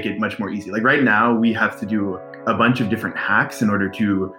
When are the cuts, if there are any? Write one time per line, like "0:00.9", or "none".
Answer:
0:02.3